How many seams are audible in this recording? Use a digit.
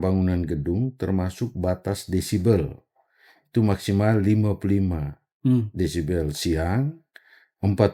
0